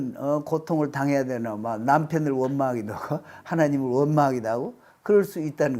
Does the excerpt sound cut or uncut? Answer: uncut